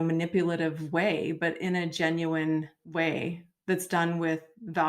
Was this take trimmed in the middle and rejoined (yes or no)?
yes